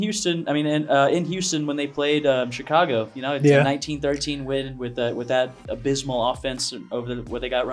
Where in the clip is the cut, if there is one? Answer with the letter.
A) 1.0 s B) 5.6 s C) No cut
C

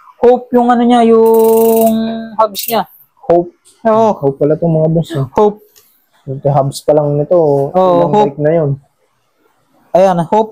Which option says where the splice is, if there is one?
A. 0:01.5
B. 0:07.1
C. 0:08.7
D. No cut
D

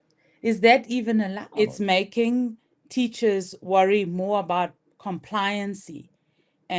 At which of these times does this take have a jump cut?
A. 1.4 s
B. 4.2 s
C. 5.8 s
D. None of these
A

